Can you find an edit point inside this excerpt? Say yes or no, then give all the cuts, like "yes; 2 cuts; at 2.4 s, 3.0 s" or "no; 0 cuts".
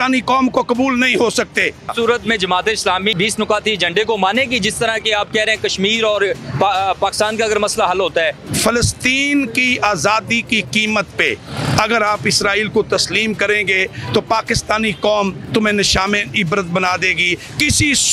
yes; 3 cuts; at 1.9 s, 3.1 s, 8.4 s